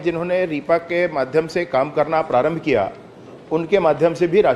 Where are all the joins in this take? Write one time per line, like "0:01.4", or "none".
none